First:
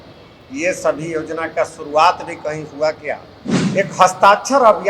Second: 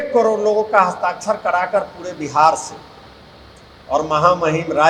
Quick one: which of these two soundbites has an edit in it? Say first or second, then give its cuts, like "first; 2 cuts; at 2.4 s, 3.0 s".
first; 1 cut; at 3.7 s